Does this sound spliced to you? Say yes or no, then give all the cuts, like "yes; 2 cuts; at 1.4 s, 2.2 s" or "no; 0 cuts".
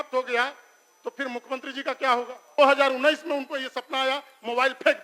yes; 1 cut; at 2.6 s